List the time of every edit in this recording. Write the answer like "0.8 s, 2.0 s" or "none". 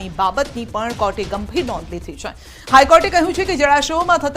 1.5 s